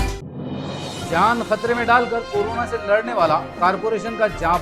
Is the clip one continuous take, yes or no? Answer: yes